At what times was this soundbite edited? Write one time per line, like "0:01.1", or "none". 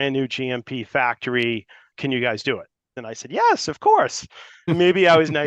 0:01.9
0:03.0
0:04.7